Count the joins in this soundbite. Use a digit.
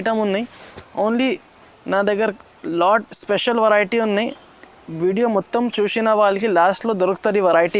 0